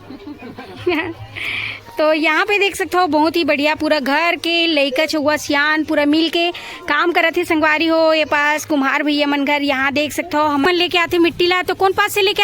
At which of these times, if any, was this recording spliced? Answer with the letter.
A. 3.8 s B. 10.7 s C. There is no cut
B